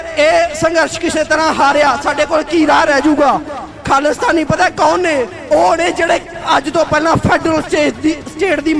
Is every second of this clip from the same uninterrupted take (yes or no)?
yes